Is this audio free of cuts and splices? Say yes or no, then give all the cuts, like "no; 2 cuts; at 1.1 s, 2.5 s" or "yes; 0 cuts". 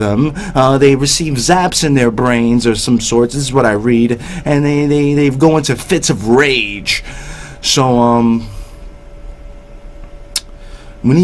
yes; 0 cuts